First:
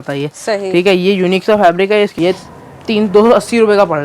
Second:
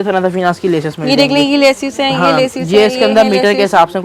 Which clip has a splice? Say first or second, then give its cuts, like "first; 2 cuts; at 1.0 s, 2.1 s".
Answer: first; 1 cut; at 2.1 s